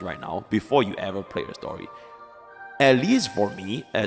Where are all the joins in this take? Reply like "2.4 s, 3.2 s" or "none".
none